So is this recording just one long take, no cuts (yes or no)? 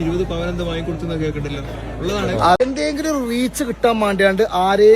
no